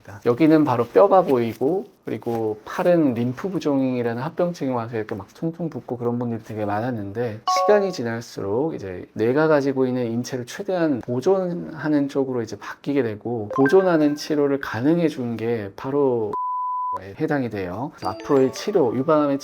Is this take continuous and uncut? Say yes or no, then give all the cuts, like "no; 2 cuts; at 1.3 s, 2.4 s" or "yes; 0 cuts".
no; 2 cuts; at 16.6 s, 17.9 s